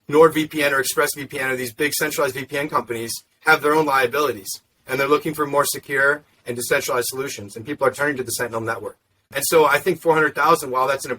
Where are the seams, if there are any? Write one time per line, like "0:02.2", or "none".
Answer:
0:09.4